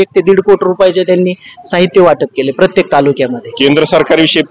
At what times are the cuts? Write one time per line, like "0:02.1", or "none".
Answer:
0:03.4